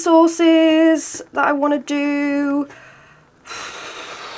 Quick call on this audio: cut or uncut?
uncut